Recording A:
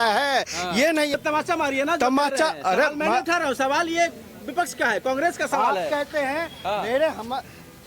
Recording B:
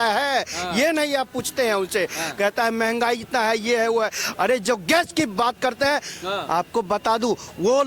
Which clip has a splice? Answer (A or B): A